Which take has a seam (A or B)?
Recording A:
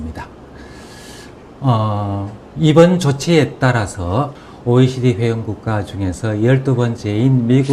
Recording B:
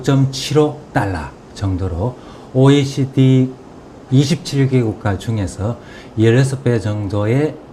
B